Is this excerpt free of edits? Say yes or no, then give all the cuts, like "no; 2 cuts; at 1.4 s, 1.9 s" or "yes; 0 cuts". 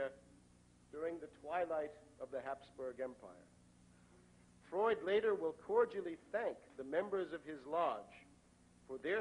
yes; 0 cuts